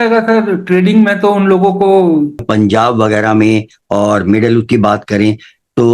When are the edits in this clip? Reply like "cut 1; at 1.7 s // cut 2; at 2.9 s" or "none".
cut 1; at 2.4 s